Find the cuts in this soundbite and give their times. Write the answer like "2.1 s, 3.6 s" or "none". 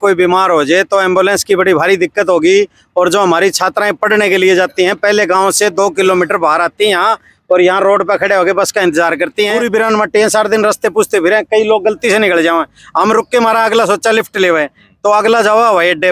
9.6 s